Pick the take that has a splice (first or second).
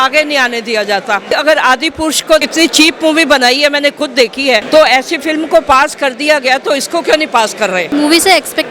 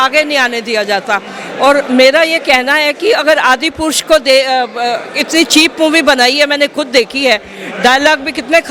first